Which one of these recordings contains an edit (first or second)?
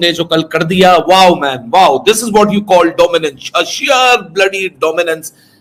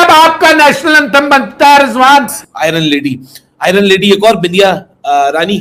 second